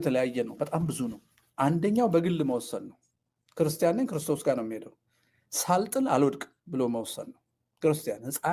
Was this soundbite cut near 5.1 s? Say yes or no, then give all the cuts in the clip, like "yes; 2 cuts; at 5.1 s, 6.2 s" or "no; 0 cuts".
no; 0 cuts